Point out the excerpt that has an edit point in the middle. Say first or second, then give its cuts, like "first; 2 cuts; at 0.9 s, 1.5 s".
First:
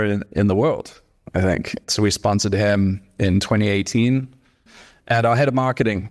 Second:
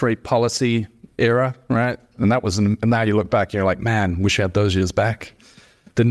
first; 1 cut; at 4.7 s